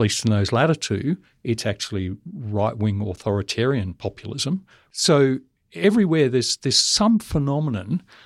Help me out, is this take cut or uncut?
cut